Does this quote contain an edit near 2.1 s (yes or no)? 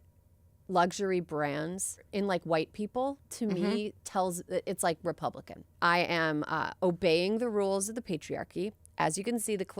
yes